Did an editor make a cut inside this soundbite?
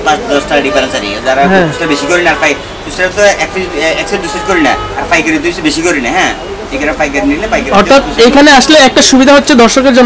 no; 0 cuts

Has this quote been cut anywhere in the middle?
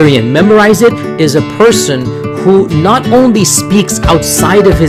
no; 0 cuts

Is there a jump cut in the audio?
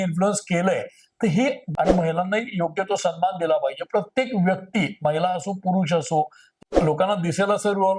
yes; 2 cuts; at 1.6 s, 6.4 s

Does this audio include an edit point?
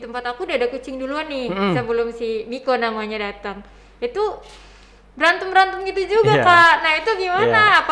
no; 0 cuts

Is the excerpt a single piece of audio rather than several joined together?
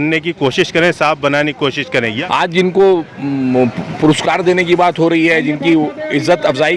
no; 1 cut; at 2.1 s

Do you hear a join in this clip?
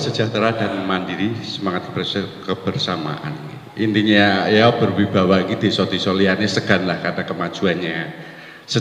no; 0 cuts

